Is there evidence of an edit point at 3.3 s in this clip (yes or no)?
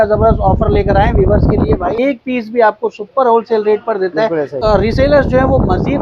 no